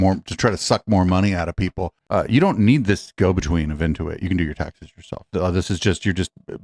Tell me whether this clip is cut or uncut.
cut